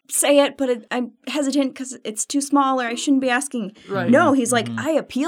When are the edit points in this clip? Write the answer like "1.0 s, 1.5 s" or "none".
none